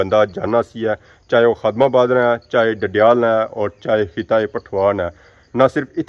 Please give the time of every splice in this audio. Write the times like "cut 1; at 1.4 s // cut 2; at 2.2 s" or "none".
none

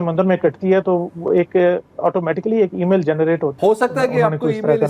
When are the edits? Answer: cut 1; at 3.5 s

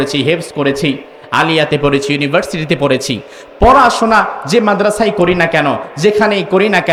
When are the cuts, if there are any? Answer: none

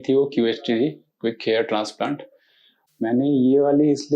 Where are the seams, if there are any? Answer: none

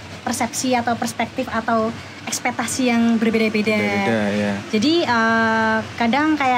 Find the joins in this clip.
none

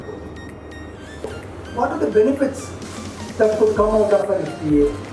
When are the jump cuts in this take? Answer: cut 1; at 1.3 s

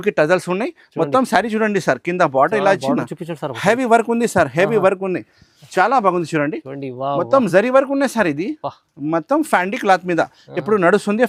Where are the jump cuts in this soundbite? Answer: none

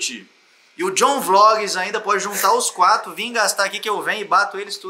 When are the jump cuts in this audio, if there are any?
none

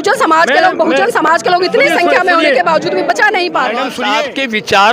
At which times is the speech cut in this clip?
cut 1; at 4.0 s

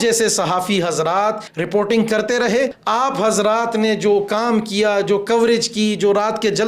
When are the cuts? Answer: cut 1; at 1.5 s // cut 2; at 2.8 s

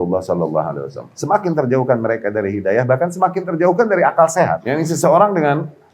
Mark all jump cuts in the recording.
cut 1; at 4.6 s

